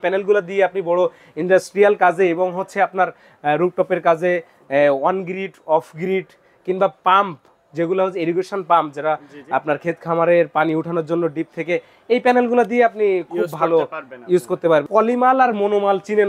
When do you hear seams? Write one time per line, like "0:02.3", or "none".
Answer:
0:14.9